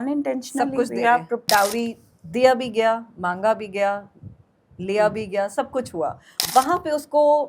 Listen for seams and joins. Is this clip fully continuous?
no; 2 cuts; at 1.4 s, 6.3 s

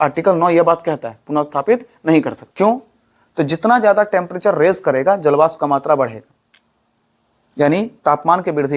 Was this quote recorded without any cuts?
no; 1 cut; at 2.4 s

